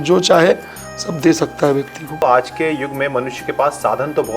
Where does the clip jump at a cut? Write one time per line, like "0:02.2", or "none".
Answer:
0:02.2